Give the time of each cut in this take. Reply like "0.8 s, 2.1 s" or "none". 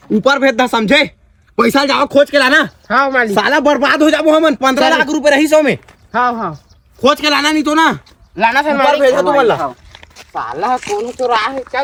none